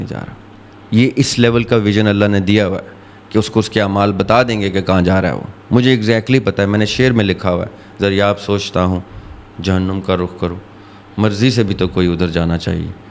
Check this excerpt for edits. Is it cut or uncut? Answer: uncut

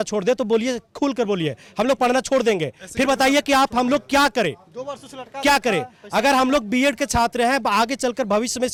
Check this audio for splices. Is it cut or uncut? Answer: uncut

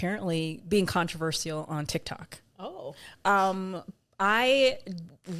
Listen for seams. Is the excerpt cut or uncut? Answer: uncut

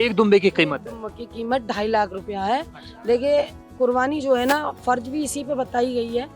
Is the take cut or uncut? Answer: uncut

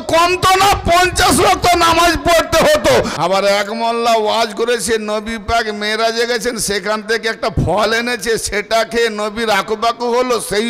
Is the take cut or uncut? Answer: cut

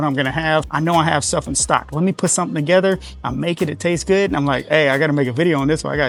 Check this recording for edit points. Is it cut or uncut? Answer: uncut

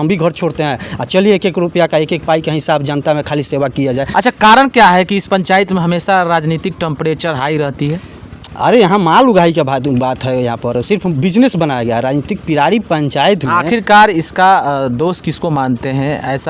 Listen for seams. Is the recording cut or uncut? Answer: uncut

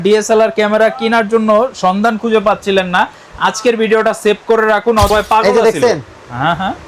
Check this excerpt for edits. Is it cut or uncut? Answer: cut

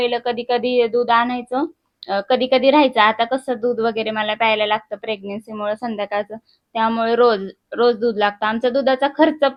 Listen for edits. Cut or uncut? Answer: uncut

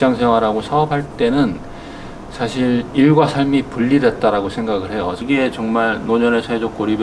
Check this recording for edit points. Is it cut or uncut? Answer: cut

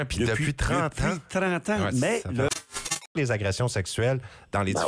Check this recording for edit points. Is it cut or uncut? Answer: cut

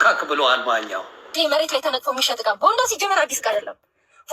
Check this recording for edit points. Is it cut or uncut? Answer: cut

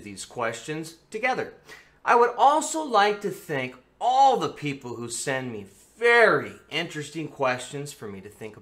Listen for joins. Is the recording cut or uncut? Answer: cut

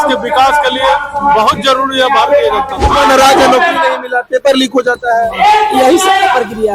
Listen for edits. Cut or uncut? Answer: cut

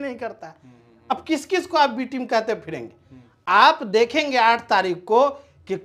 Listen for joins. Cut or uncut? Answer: uncut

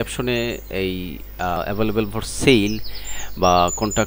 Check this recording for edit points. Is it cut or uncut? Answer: cut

